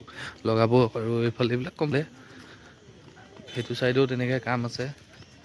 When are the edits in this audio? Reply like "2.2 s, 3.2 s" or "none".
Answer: 1.9 s